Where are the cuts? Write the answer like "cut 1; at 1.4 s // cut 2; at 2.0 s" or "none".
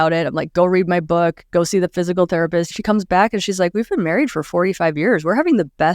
cut 1; at 2.7 s